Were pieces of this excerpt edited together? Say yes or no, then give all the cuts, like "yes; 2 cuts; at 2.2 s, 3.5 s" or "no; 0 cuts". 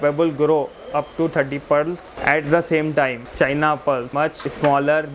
yes; 3 cuts; at 2.1 s, 3.2 s, 4.2 s